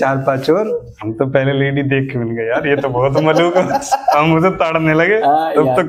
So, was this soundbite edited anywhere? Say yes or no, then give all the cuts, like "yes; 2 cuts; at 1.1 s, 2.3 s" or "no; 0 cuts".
no; 0 cuts